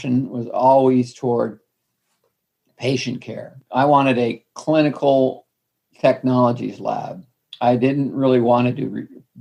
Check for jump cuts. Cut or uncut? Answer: uncut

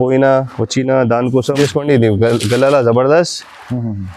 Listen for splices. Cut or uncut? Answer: cut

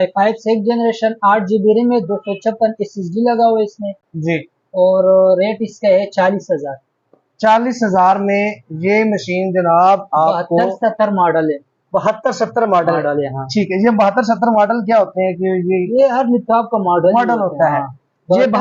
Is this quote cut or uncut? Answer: uncut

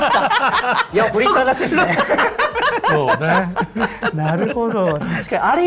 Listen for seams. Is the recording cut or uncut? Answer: uncut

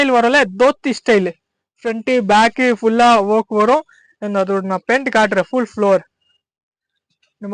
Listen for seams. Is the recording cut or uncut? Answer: uncut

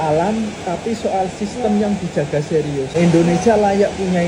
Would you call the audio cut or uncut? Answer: uncut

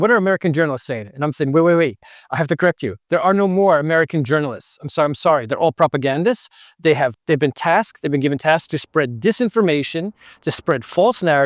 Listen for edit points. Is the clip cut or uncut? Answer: uncut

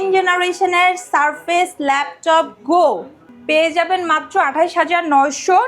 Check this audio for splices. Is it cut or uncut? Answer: uncut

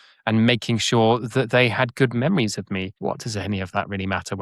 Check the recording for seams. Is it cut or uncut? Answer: cut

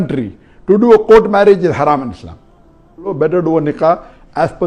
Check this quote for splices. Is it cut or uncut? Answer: cut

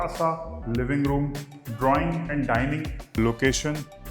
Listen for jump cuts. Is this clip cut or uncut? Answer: cut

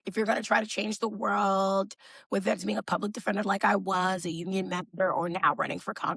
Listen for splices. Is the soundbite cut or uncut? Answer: uncut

